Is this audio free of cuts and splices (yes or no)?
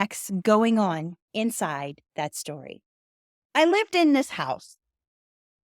yes